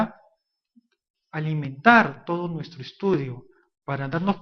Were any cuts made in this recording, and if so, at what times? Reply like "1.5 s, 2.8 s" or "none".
none

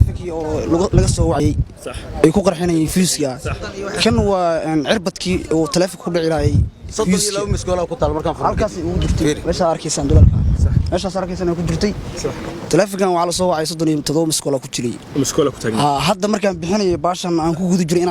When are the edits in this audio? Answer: 1.4 s

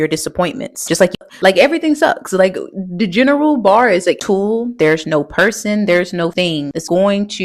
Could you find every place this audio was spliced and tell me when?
1.2 s, 4.2 s

